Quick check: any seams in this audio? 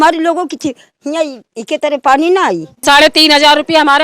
yes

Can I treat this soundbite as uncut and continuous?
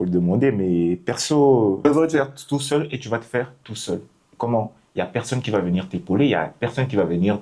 no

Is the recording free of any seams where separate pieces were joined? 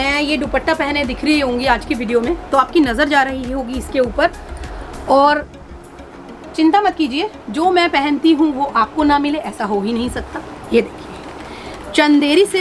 yes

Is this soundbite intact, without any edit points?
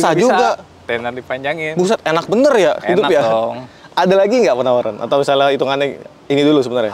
yes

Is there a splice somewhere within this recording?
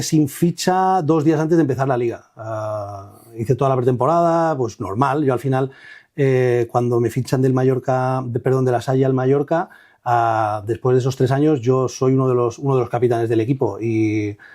no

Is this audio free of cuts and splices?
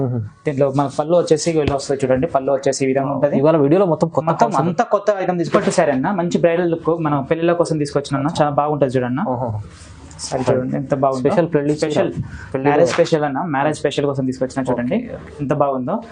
no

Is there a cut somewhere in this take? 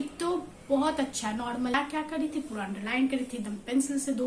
yes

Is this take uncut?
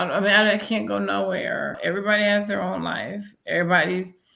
no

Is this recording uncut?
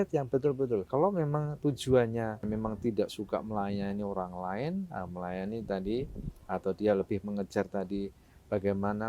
no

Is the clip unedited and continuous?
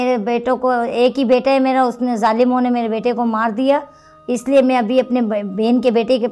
yes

